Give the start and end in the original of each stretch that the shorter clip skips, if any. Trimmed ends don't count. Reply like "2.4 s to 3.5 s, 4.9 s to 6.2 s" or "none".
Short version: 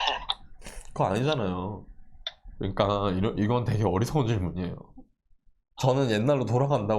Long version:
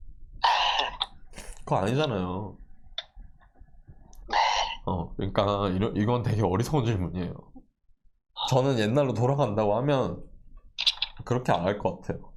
3.2 s to 5.1 s, 8.4 s to 8.5 s